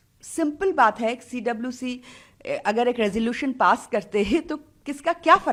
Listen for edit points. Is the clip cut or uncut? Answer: uncut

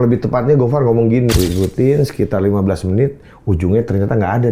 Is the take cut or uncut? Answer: cut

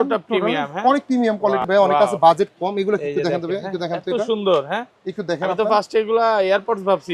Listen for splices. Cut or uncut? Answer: cut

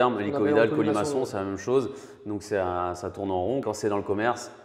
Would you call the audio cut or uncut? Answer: cut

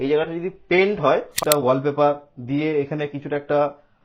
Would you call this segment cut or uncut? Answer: cut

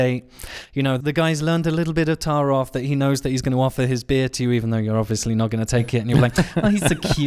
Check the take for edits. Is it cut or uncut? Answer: cut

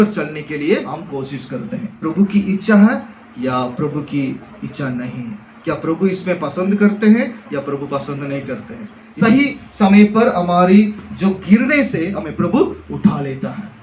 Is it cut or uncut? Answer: cut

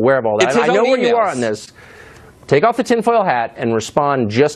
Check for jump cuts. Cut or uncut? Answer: cut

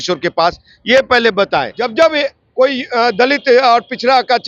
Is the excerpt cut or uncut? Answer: cut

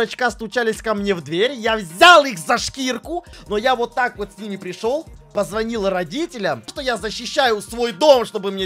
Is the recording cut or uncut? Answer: cut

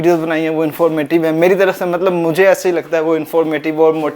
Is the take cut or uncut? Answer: uncut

